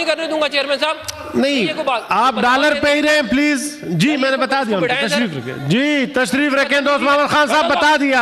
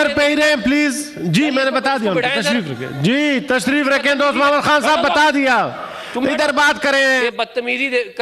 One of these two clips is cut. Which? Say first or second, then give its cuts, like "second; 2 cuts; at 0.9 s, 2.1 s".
second; 1 cut; at 7.2 s